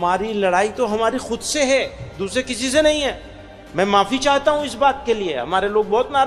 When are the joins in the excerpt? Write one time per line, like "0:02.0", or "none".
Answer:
none